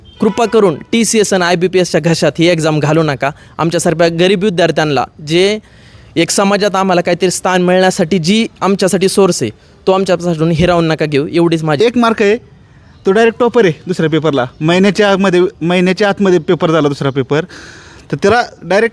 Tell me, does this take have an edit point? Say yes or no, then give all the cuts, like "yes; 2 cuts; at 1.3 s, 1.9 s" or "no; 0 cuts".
yes; 1 cut; at 11.8 s